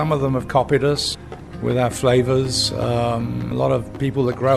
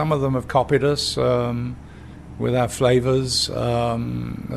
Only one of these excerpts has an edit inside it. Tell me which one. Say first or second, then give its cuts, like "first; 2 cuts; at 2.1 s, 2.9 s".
first; 2 cuts; at 1.1 s, 3.5 s